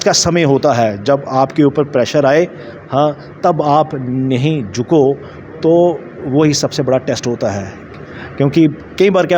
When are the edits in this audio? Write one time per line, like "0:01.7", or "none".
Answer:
none